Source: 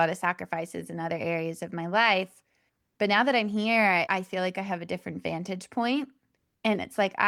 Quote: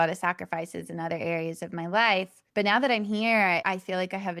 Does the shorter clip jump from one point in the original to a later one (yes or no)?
yes